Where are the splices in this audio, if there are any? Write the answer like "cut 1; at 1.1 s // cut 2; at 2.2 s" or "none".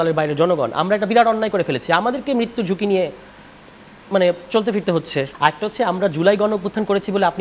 cut 1; at 5.3 s